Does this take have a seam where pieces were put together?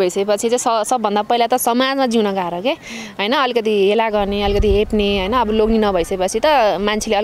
no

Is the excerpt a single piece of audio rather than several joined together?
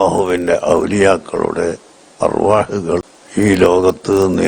no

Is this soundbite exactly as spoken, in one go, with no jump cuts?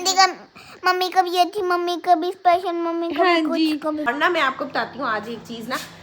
no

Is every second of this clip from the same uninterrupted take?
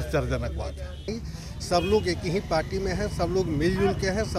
no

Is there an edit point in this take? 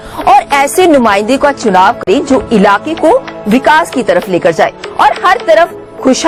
no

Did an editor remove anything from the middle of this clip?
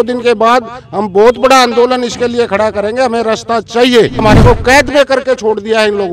yes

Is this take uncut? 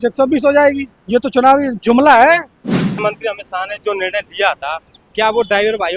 no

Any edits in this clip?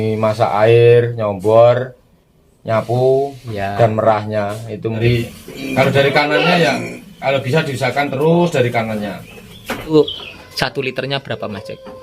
yes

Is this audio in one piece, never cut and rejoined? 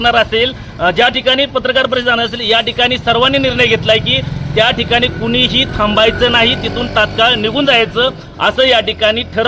yes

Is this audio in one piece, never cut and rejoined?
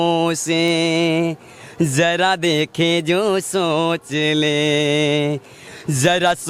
yes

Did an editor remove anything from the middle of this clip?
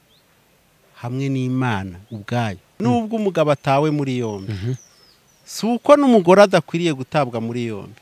yes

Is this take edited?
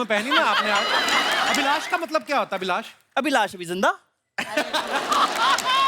yes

